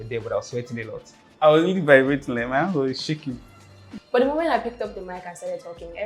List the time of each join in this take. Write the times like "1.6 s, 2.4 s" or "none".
1.2 s